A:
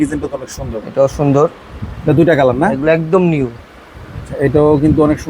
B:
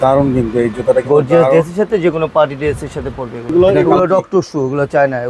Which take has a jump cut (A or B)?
B